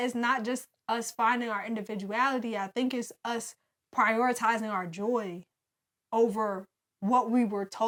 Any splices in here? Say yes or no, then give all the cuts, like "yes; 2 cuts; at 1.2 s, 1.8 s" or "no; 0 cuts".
no; 0 cuts